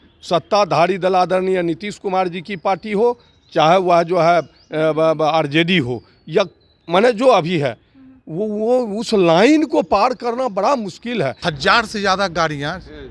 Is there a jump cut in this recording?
yes; 1 cut; at 11.4 s

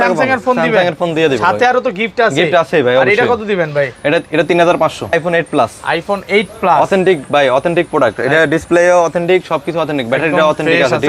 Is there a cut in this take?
yes; 1 cut; at 5.1 s

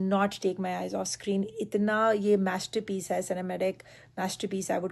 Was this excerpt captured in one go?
yes; 0 cuts

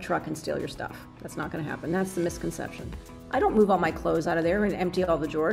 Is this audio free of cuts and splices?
no; 1 cut; at 3.1 s

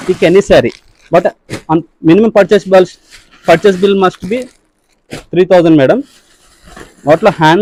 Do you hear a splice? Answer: no; 0 cuts

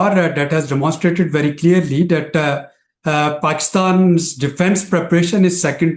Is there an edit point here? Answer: no; 0 cuts

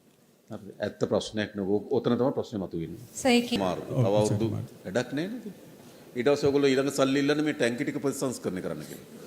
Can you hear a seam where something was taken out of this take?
yes; 1 cut; at 3.6 s

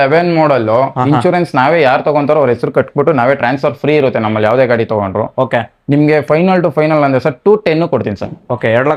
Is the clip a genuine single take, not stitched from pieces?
yes; 0 cuts

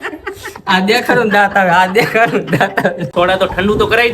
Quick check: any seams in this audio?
yes; 1 cut; at 3.0 s

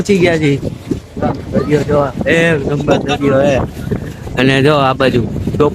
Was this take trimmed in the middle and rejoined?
no; 0 cuts

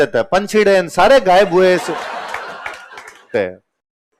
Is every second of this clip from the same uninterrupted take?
no; 1 cut; at 3.3 s

